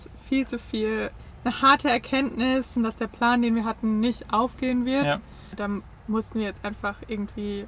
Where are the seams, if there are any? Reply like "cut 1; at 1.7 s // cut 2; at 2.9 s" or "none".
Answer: cut 1; at 1.2 s // cut 2; at 2.7 s // cut 3; at 5.5 s